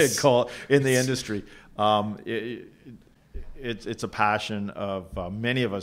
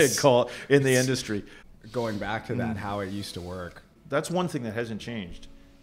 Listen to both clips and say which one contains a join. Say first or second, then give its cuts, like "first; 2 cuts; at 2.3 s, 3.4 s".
second; 2 cuts; at 1.6 s, 3.9 s